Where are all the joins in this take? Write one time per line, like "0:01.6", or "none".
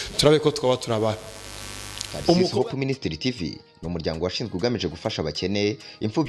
0:02.5